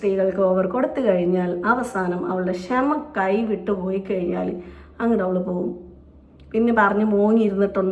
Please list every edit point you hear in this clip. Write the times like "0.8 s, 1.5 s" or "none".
none